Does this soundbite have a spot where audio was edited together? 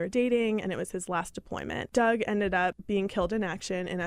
yes; 2 cuts; at 1.8 s, 2.8 s

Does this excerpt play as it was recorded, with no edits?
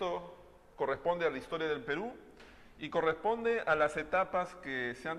no; 1 cut; at 2.0 s

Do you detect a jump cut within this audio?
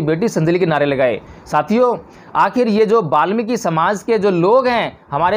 no; 0 cuts

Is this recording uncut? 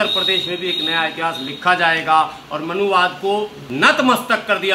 no; 1 cut; at 3.6 s

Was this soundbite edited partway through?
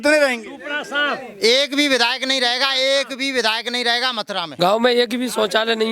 yes; 1 cut; at 4.4 s

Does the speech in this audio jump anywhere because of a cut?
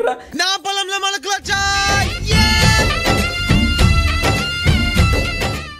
no; 0 cuts

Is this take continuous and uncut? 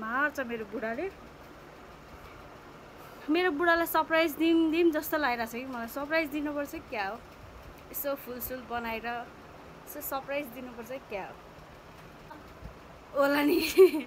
no; 1 cut; at 12.5 s

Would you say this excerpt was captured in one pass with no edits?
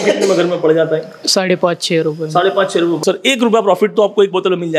no; 1 cut; at 3.0 s

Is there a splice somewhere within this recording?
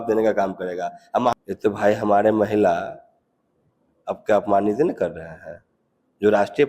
yes; 1 cut; at 1.3 s

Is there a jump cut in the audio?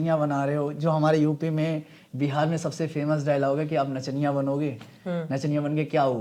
no; 0 cuts

